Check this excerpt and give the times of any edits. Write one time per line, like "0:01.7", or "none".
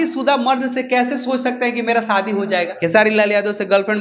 0:02.7